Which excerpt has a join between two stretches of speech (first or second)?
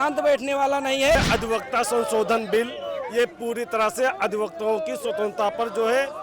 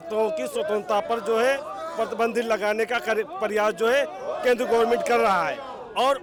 first